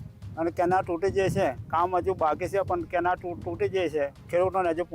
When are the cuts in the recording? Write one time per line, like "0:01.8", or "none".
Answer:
none